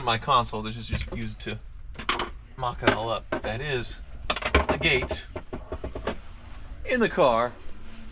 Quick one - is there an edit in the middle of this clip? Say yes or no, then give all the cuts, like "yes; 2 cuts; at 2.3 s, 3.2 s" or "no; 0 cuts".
no; 0 cuts